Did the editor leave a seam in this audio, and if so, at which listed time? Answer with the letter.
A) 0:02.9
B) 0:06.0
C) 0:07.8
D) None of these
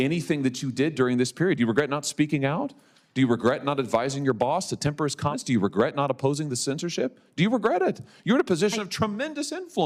D